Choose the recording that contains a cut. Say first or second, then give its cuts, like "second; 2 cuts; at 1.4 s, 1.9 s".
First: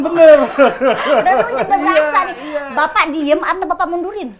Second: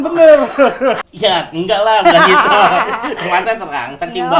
second; 1 cut; at 1.0 s